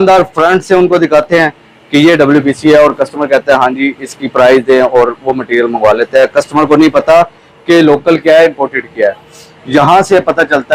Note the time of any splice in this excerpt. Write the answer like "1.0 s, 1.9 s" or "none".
none